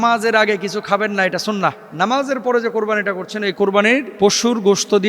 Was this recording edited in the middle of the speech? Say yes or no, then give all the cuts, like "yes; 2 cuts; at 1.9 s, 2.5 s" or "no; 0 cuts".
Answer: yes; 2 cuts; at 1.8 s, 4.1 s